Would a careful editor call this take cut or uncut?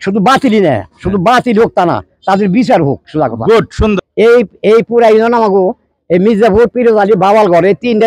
cut